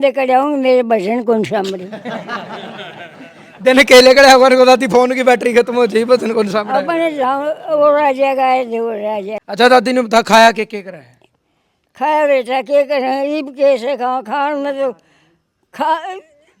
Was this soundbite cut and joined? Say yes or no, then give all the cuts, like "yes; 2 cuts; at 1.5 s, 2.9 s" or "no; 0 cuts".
yes; 1 cut; at 9.4 s